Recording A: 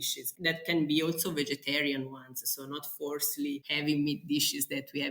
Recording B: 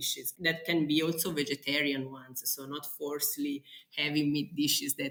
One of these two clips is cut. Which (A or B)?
A